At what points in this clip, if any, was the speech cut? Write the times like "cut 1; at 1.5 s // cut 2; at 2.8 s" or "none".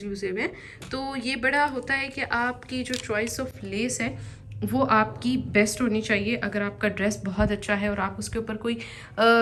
none